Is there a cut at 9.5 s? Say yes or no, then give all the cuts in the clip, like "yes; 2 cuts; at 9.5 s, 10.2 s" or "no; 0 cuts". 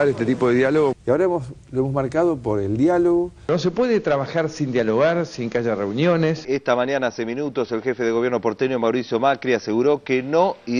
no; 3 cuts; at 0.9 s, 3.5 s, 6.4 s